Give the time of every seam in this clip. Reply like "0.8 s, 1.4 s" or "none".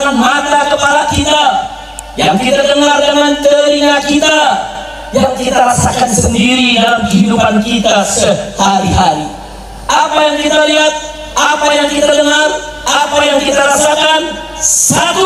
none